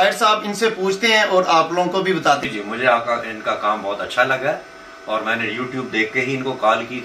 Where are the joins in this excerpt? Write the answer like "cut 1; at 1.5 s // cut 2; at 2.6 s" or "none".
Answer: cut 1; at 2.4 s